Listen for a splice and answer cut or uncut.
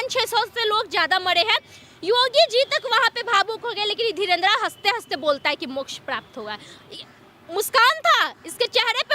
uncut